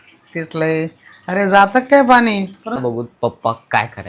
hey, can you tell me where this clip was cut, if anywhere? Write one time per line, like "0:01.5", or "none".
0:02.8